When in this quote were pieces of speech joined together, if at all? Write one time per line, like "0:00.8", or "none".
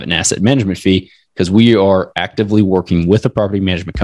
none